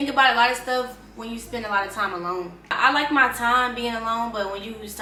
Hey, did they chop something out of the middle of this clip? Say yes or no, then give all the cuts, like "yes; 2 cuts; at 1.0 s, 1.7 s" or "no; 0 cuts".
no; 0 cuts